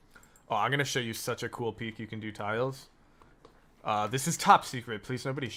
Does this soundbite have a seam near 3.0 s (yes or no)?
no